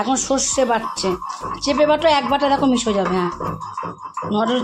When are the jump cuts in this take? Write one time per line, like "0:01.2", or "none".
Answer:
none